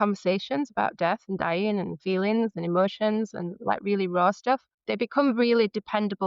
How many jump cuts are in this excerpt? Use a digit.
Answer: 1